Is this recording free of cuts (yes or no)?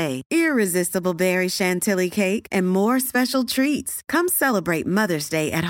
yes